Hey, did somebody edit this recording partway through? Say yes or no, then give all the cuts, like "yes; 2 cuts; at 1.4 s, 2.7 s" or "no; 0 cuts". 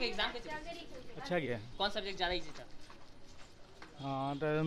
no; 0 cuts